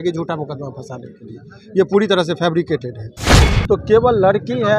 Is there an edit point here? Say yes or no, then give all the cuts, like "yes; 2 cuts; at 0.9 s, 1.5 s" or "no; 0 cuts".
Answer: yes; 1 cut; at 3.2 s